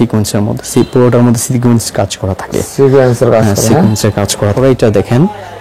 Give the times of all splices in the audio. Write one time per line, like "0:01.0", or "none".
0:04.5